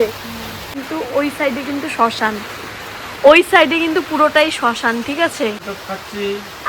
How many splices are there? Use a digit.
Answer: 2